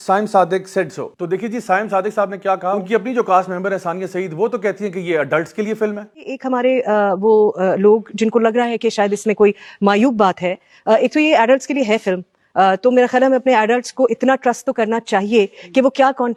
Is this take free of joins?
yes; 0 cuts

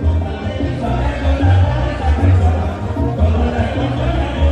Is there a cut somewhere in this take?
yes; 1 cut; at 2.9 s

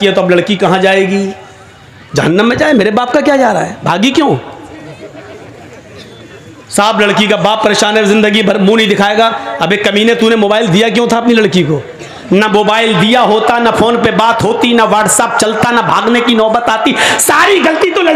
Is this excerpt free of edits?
yes; 0 cuts

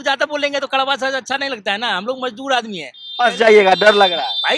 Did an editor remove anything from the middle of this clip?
no; 0 cuts

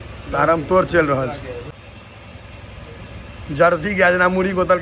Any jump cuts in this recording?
yes; 1 cut; at 1.8 s

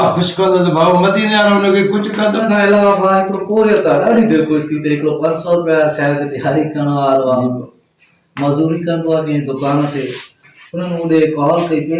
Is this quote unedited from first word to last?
no; 1 cut; at 2.4 s

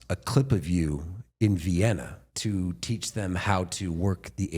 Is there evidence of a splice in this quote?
yes; 1 cut; at 2.2 s

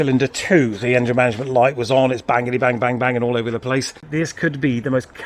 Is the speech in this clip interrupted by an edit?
yes; 1 cut; at 4.0 s

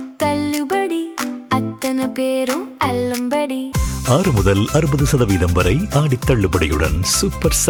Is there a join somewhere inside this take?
no; 0 cuts

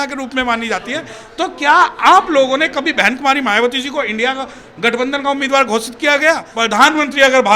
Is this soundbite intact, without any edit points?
no; 1 cut; at 6.5 s

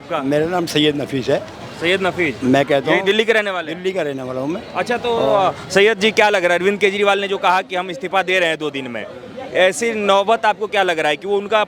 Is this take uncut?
yes; 0 cuts

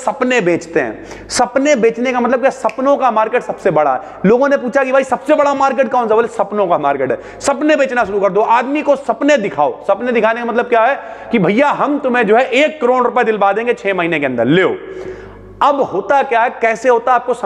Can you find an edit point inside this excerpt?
no; 0 cuts

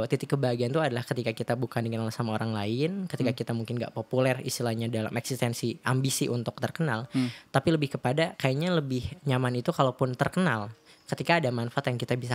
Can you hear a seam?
no; 0 cuts

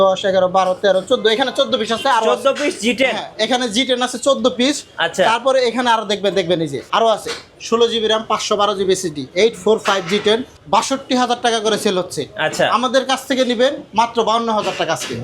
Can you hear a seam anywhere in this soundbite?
yes; 2 cuts; at 6.8 s, 10.5 s

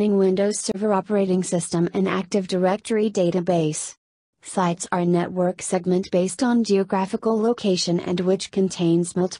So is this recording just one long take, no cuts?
yes; 0 cuts

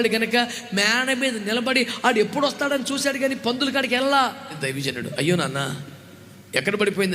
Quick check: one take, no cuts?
no; 1 cut; at 4.6 s

